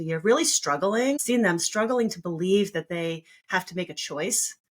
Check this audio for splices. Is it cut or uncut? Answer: cut